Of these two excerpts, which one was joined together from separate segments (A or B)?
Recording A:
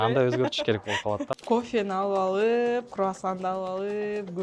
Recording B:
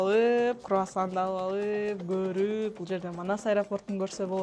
A